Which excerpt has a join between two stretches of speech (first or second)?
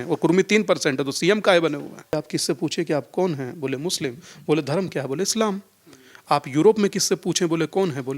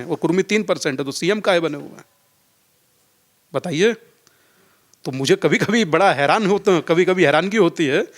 first